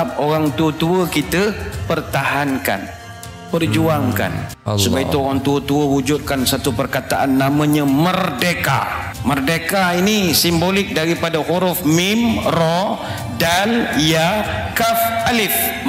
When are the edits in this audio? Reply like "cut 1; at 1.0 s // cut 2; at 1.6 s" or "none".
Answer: cut 1; at 4.5 s